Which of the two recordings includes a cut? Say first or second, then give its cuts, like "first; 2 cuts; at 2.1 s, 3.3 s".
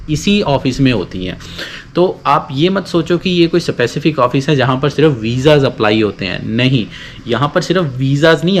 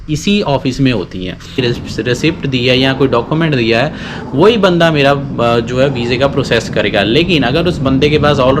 second; 1 cut; at 1.6 s